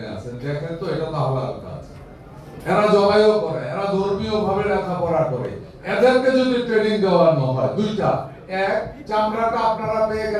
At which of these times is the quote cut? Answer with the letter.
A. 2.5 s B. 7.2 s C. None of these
A